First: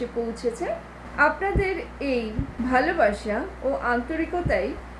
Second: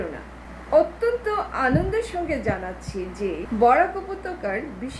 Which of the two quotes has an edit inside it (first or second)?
second